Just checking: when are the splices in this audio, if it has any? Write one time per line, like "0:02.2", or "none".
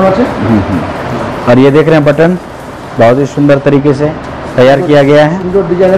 none